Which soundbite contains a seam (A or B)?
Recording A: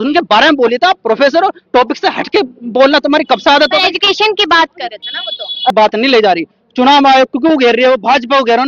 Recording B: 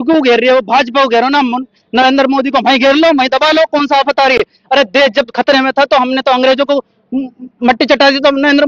A